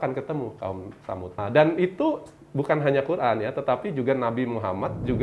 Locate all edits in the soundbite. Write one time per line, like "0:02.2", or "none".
0:01.4